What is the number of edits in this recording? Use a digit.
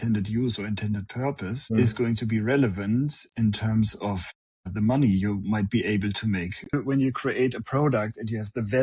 1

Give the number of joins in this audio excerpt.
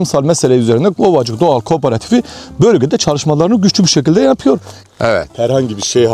1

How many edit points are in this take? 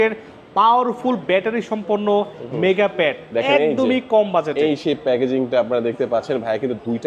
0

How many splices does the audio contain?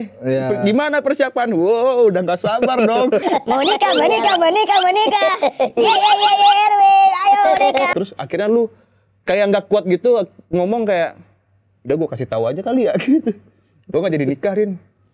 1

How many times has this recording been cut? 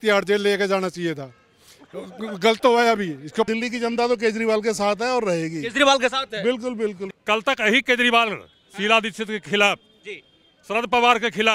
2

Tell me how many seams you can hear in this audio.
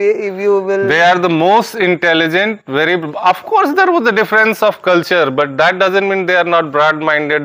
0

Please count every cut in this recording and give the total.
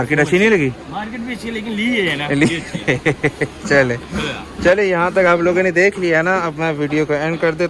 0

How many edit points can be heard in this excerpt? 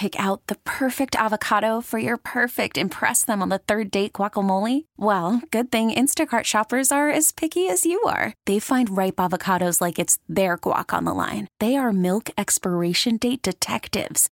0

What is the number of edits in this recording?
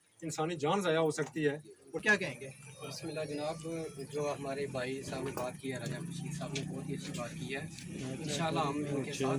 1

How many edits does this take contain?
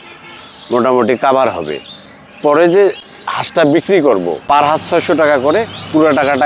1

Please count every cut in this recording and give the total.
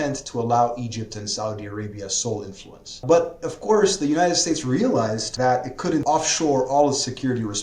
3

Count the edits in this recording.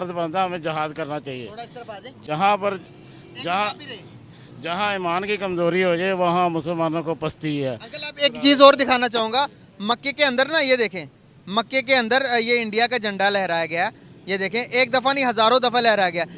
0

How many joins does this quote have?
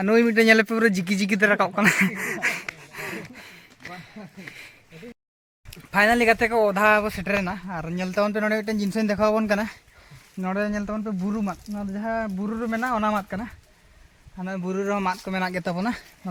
0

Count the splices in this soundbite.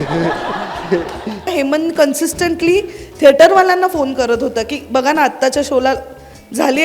1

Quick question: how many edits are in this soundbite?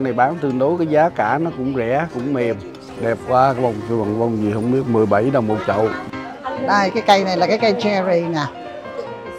2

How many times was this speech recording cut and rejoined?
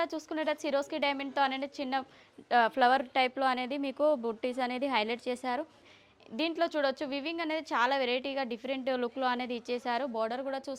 1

